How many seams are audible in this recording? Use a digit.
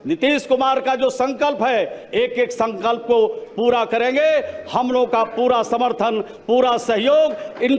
0